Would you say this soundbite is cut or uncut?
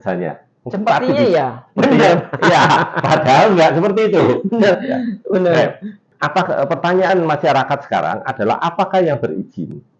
uncut